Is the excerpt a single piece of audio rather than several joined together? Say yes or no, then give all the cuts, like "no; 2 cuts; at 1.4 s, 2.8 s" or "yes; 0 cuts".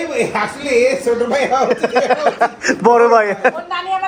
yes; 0 cuts